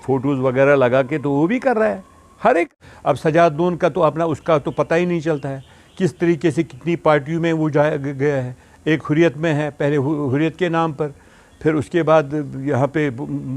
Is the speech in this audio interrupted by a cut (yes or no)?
yes